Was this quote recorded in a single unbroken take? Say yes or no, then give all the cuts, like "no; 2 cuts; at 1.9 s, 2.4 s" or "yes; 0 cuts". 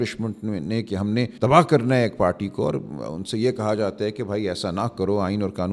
no; 1 cut; at 1.3 s